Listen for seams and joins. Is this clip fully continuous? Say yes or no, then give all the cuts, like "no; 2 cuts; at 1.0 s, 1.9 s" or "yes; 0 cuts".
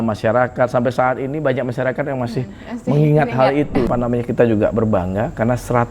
no; 1 cut; at 3.9 s